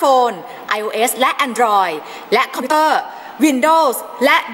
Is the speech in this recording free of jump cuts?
no; 1 cut; at 2.7 s

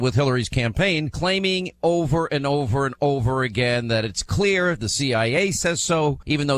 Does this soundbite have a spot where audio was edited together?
yes; 1 cut; at 3.1 s

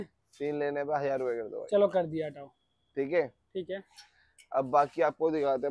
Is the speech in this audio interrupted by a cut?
no; 0 cuts

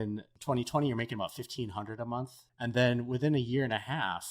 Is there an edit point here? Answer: yes; 1 cut; at 2.4 s

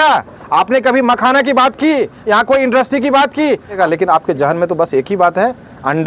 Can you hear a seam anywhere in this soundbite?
yes; 1 cut; at 3.8 s

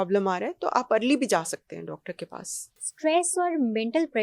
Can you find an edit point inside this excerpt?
yes; 1 cut; at 2.9 s

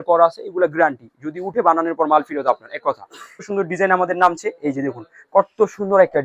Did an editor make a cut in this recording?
yes; 1 cut; at 3.5 s

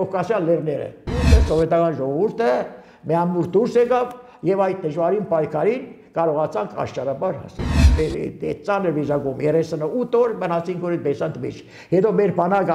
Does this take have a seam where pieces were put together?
yes; 2 cuts; at 1.3 s, 7.8 s

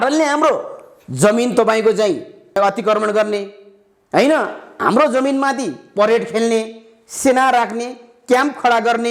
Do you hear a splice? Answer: yes; 1 cut; at 2.6 s

